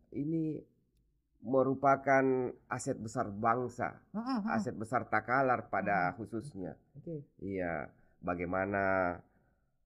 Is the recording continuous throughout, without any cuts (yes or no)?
yes